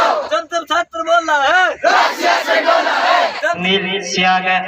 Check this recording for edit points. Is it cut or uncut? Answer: cut